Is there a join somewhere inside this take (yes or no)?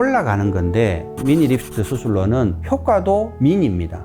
yes